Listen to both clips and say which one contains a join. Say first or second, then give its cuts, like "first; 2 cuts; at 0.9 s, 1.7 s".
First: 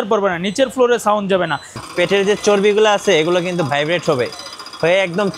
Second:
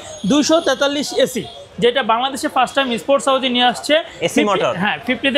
first; 1 cut; at 1.8 s